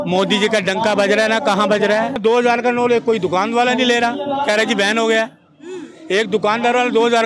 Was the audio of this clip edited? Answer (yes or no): yes